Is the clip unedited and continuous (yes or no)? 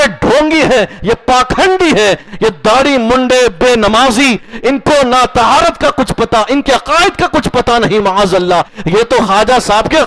yes